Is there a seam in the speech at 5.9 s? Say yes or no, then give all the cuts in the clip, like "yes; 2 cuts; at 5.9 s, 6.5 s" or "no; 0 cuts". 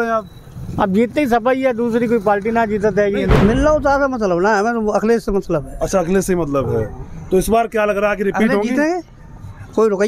no; 1 cut; at 3.3 s